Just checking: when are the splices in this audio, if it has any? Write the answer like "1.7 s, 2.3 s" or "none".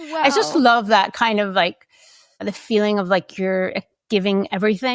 4.0 s